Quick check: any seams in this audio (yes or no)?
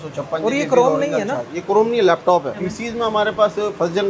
yes